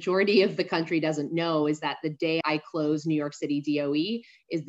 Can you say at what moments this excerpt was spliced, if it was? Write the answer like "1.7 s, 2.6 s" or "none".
2.4 s